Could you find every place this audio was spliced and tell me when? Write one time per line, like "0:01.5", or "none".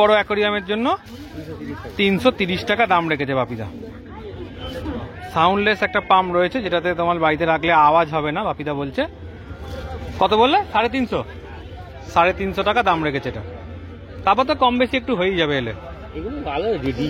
none